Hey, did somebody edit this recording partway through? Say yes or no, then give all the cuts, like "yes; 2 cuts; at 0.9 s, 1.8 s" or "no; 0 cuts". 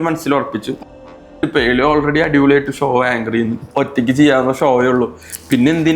yes; 2 cuts; at 1.2 s, 3.6 s